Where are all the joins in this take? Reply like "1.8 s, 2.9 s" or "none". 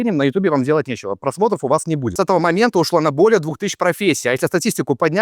2.1 s

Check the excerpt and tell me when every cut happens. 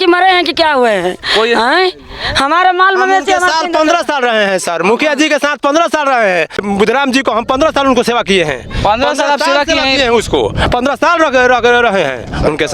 none

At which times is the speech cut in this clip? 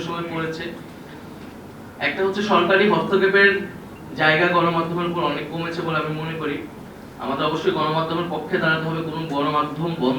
6.8 s

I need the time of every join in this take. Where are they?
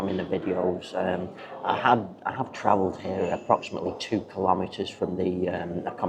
none

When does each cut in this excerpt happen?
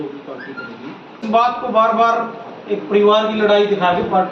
1.2 s

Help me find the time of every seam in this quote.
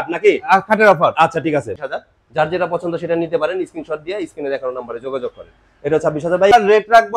1.7 s, 6.5 s

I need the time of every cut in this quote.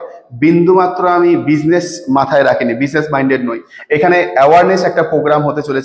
3.7 s

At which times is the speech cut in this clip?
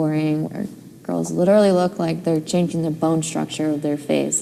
none

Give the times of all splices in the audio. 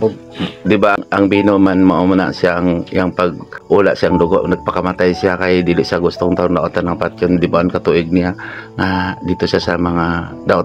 1.0 s, 3.5 s

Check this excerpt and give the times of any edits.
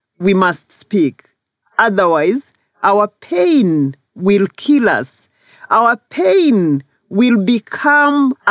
none

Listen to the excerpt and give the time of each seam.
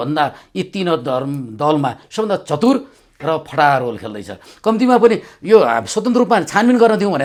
none

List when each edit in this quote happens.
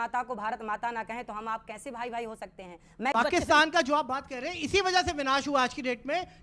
3.1 s

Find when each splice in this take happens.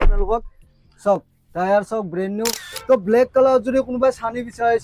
2.7 s

